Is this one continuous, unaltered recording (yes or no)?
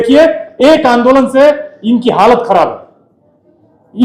yes